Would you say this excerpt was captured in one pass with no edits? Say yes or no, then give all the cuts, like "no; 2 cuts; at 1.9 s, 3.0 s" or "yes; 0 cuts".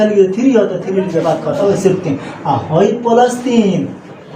no; 1 cut; at 1.6 s